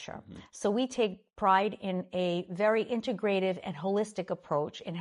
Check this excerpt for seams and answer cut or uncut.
uncut